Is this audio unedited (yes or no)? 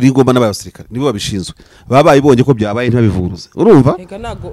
yes